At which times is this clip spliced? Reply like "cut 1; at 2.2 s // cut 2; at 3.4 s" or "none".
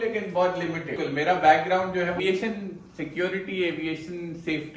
cut 1; at 1.0 s // cut 2; at 2.2 s